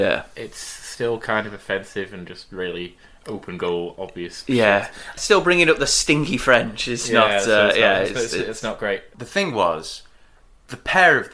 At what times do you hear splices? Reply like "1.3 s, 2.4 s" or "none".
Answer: 5.2 s, 9.1 s